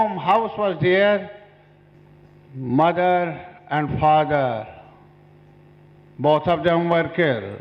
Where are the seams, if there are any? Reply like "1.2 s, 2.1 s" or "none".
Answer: 1.9 s